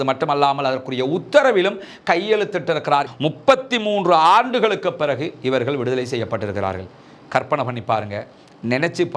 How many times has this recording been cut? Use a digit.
1